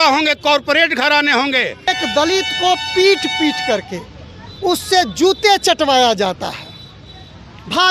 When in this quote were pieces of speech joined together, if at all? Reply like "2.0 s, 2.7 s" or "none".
1.9 s

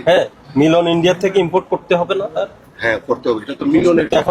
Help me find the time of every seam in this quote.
none

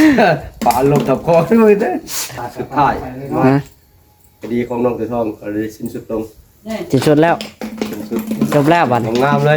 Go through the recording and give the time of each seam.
2.2 s

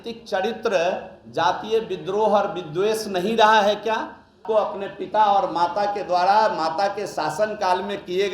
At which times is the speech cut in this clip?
4.4 s

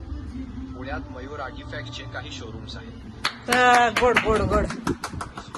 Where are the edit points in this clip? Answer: none

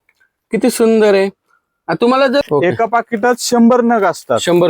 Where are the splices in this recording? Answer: 2.4 s

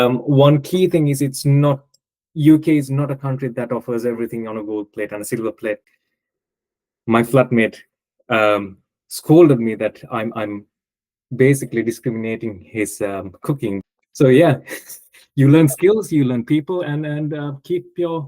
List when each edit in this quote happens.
5.9 s, 13.8 s

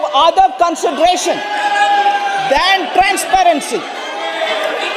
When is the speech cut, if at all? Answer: none

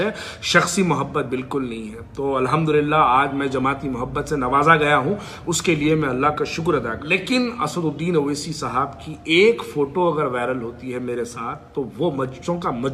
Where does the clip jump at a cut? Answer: 7.1 s

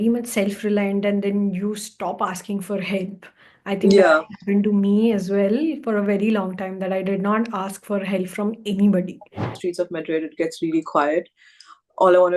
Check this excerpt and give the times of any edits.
9.6 s

